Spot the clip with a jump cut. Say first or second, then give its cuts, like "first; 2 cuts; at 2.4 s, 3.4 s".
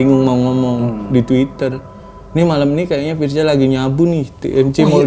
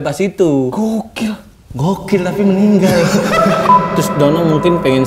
second; 1 cut; at 3.7 s